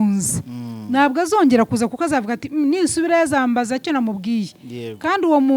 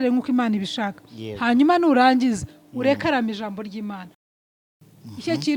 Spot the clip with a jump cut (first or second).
second